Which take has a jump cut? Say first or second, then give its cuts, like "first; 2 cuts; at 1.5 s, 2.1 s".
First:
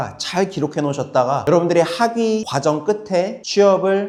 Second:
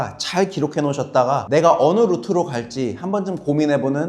second; 1 cut; at 1.4 s